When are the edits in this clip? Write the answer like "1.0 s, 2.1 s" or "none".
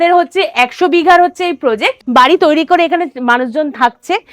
2.0 s